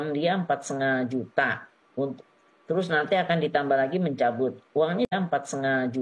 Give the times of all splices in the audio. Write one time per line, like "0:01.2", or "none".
0:05.1